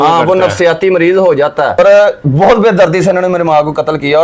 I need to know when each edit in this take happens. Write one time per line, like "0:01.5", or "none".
0:01.8